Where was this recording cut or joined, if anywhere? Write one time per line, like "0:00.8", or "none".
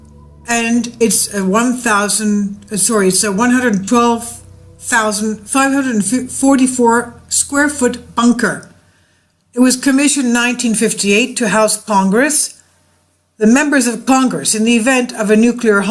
0:01.4

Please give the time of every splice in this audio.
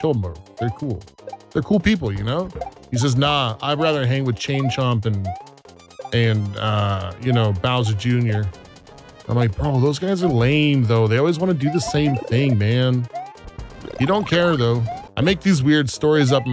0:15.0

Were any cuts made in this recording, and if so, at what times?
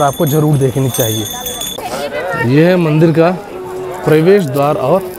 0:01.7

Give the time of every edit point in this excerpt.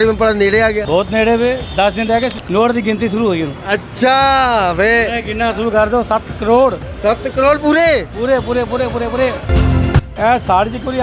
0:00.8
0:02.4
0:09.6

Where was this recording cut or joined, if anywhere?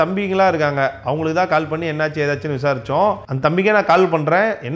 none

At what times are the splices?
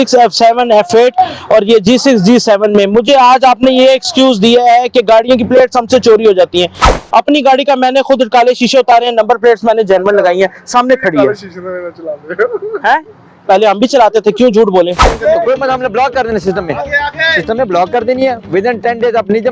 0:06.7
0:15.0

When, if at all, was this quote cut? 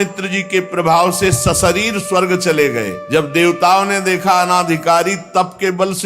0:03.0

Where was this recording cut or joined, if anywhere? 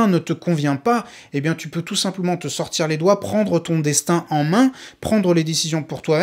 none

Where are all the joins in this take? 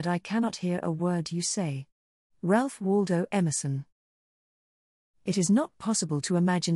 0:04.5

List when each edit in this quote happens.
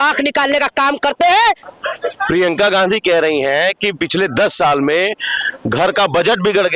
0:01.6

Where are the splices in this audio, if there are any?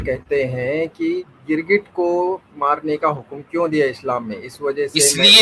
0:01.3

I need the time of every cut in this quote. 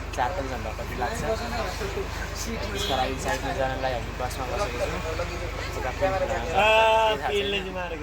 none

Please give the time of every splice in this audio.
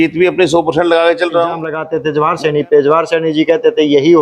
0:02.0

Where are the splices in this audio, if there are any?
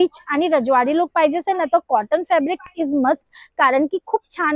none

